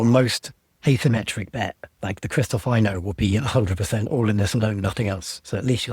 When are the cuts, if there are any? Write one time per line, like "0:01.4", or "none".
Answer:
0:01.9